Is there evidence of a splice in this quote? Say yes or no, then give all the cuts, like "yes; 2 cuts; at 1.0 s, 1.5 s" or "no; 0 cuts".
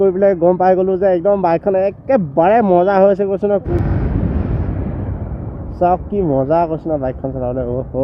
yes; 1 cut; at 3.7 s